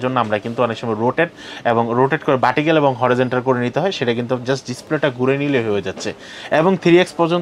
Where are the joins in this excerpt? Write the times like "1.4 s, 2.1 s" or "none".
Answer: none